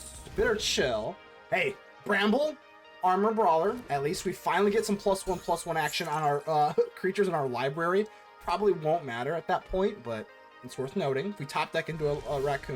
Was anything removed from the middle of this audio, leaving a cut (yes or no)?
yes